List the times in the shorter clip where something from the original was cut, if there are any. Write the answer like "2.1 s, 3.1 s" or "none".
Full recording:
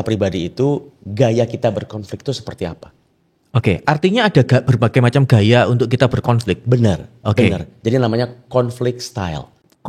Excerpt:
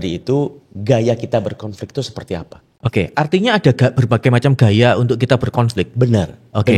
2.6 s